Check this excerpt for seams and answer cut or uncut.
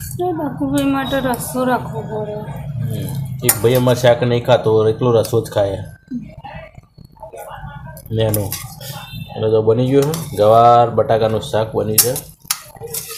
uncut